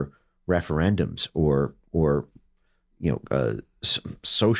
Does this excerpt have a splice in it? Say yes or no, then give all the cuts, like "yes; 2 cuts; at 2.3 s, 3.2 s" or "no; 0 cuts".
no; 0 cuts